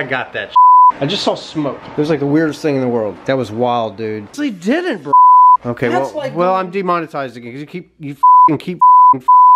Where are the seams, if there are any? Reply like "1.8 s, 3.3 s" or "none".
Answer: 1.0 s, 3.1 s, 4.3 s